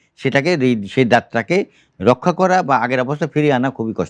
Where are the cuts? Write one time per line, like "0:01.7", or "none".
none